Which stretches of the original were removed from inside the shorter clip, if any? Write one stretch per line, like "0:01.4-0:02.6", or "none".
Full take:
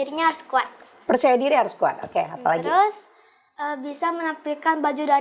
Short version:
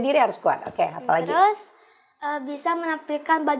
none